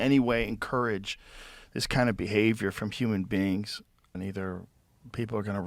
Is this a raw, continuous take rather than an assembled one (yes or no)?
no